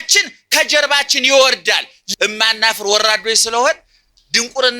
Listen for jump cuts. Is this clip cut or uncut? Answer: cut